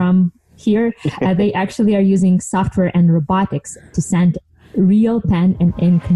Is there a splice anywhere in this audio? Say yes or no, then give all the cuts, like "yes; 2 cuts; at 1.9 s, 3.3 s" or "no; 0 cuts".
no; 0 cuts